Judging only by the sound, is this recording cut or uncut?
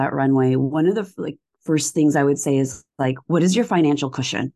uncut